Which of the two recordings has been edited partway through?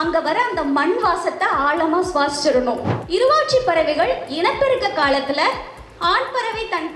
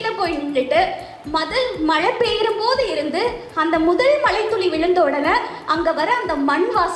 first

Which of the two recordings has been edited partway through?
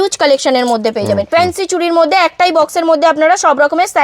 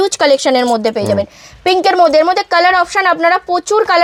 first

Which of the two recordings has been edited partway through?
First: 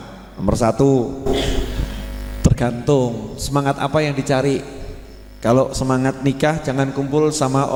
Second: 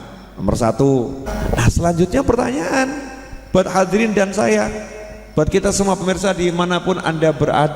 second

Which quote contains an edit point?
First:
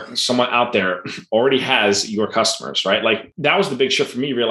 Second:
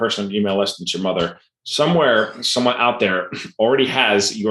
first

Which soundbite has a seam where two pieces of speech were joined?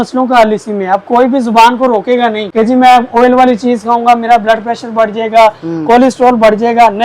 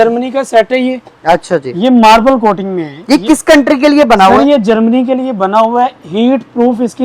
first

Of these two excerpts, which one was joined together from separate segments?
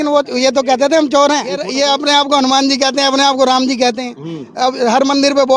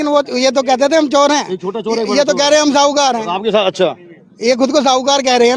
first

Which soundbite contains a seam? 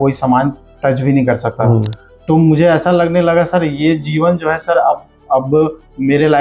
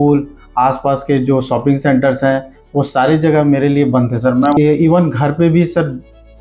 second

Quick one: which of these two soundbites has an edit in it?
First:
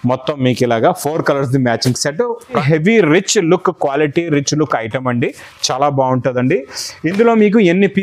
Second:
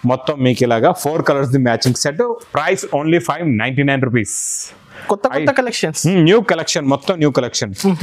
first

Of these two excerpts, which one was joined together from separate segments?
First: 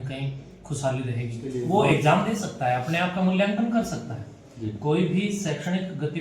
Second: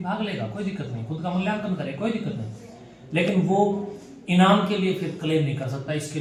first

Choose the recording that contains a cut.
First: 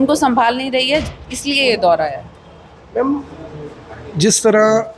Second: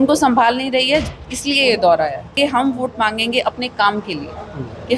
second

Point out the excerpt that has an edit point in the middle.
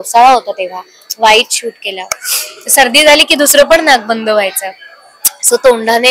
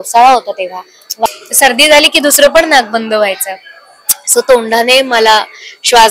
second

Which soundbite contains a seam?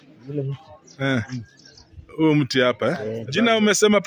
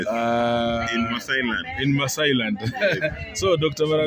first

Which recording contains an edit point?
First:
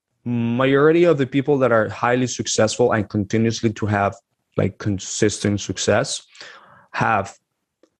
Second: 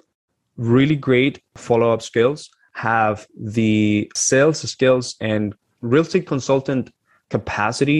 second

